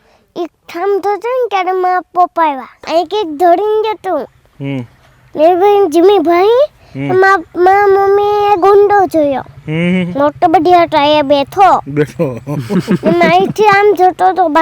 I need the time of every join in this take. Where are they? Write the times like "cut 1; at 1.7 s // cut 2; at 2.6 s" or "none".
cut 1; at 2.7 s